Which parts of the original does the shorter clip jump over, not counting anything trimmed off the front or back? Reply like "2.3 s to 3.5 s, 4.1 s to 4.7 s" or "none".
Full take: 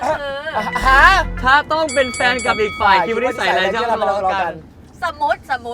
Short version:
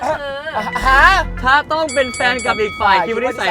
none